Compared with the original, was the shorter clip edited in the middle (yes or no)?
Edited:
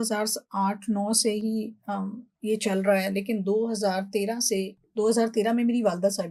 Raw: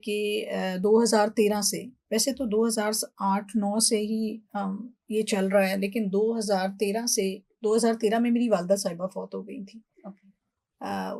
no